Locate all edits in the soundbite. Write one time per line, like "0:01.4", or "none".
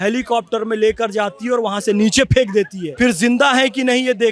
0:02.8